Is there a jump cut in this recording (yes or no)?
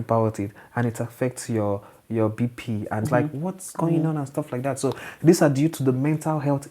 yes